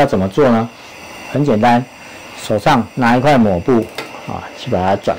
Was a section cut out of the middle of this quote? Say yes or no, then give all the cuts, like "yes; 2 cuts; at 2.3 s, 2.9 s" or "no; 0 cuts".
no; 0 cuts